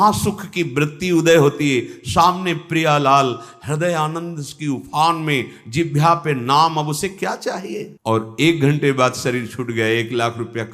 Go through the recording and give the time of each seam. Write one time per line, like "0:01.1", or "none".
0:07.9